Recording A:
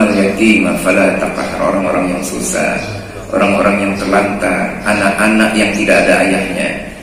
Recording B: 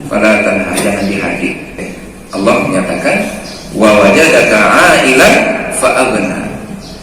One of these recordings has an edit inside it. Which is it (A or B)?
B